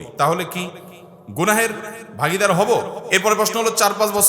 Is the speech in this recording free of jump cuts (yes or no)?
no